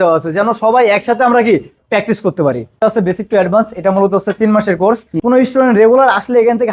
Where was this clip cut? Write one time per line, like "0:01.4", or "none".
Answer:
0:02.7
0:05.1